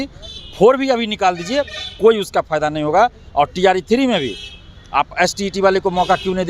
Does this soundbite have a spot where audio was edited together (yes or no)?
no